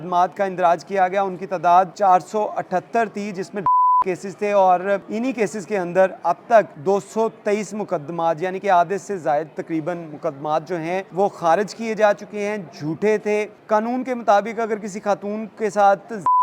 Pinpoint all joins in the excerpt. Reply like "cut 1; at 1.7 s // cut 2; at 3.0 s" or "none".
cut 1; at 1.9 s // cut 2; at 5.1 s // cut 3; at 6.7 s // cut 4; at 11.1 s // cut 5; at 13.5 s